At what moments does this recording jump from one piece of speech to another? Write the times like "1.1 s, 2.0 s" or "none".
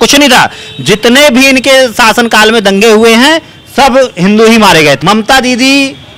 5.0 s